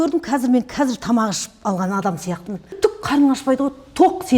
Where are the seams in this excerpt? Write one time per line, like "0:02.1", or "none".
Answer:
0:02.7